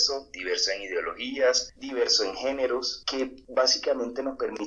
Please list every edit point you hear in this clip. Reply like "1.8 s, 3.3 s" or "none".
1.7 s, 3.3 s